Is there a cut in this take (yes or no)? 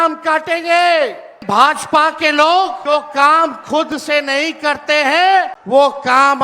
yes